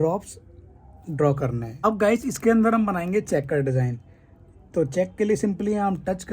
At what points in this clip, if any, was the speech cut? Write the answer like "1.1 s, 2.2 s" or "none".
1.8 s